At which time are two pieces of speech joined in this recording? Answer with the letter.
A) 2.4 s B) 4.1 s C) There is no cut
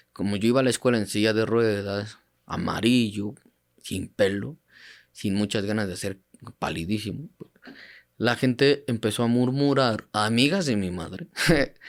C